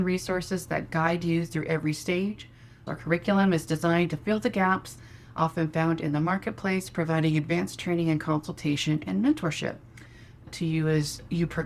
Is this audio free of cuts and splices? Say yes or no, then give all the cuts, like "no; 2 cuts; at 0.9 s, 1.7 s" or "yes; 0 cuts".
no; 2 cuts; at 2.8 s, 10.5 s